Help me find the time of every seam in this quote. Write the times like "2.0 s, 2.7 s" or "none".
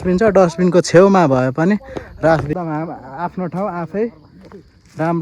2.5 s